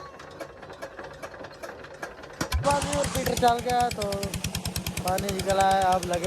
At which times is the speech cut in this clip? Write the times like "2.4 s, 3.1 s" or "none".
2.6 s